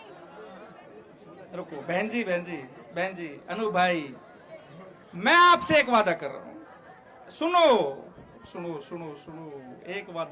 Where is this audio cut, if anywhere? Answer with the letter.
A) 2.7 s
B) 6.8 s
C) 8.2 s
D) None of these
D